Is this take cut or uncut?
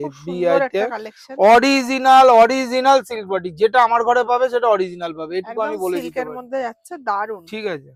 uncut